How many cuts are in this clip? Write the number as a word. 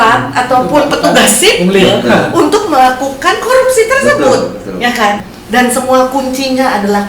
one